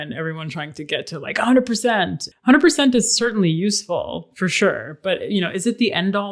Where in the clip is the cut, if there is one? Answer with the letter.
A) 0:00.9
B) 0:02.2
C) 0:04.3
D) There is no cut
B